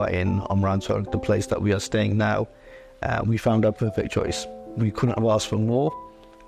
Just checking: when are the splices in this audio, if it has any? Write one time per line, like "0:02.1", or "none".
none

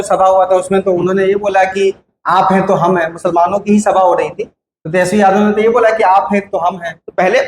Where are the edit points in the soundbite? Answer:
none

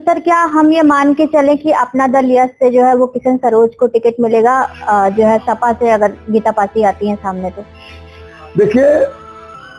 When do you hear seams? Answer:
none

